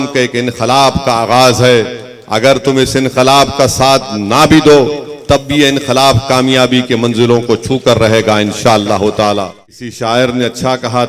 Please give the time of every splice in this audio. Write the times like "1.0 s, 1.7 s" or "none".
9.9 s